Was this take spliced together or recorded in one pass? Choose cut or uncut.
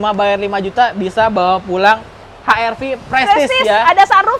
uncut